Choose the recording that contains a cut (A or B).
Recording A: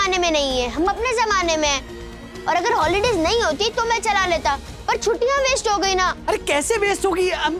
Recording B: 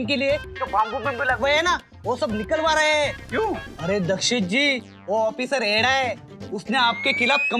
B